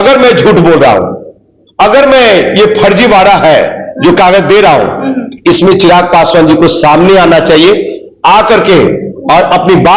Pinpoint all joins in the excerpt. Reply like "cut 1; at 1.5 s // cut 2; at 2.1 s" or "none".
none